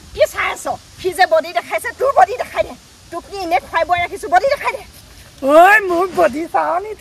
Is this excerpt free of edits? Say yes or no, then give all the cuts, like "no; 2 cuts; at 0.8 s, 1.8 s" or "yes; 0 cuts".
yes; 0 cuts